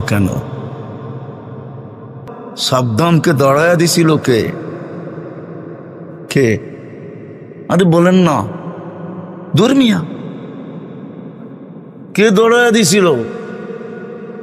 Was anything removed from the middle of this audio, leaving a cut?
yes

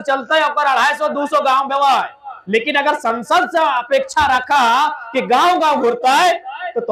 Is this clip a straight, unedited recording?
yes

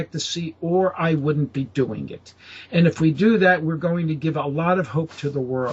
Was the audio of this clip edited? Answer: no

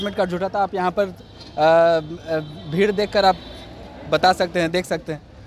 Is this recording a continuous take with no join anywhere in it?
yes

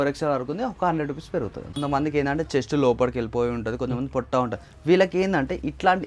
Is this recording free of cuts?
yes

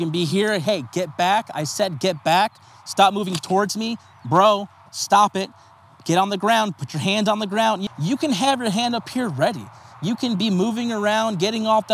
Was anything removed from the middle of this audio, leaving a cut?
no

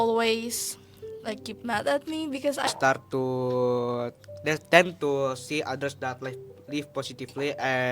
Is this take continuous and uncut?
no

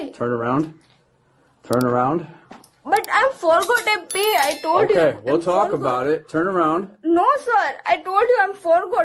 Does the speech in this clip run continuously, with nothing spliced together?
yes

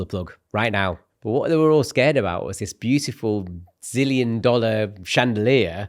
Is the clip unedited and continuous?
no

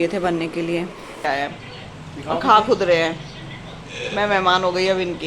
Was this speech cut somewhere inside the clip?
yes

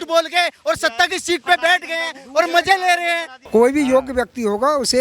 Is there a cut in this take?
yes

